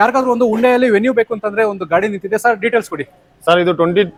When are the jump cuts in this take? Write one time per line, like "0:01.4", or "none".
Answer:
none